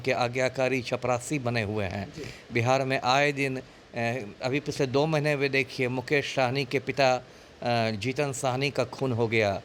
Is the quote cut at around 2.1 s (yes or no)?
no